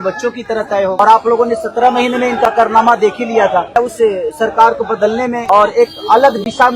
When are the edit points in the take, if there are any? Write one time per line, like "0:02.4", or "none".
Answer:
0:01.0
0:03.8
0:05.4